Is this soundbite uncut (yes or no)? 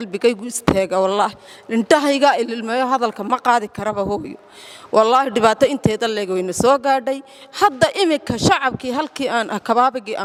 yes